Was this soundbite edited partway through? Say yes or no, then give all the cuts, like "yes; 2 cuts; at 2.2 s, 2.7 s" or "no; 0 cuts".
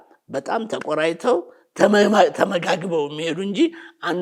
no; 0 cuts